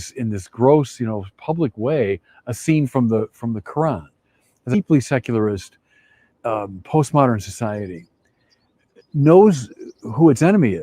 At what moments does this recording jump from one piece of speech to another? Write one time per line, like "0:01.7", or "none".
0:04.7